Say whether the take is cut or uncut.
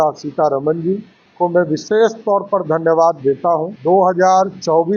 cut